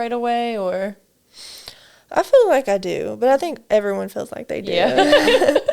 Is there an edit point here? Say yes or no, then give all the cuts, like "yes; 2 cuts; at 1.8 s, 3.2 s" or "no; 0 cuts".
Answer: no; 0 cuts